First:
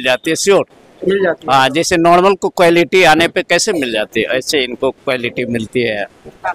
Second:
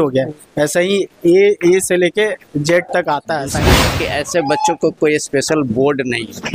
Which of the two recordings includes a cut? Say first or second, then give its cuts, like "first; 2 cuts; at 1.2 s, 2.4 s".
second; 1 cut; at 3.9 s